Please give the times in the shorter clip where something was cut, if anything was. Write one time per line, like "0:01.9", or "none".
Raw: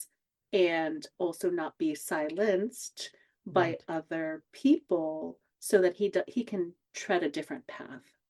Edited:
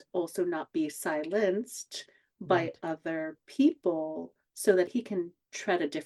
0:04.9